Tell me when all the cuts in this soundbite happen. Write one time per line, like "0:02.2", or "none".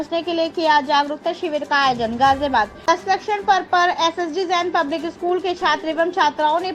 0:02.7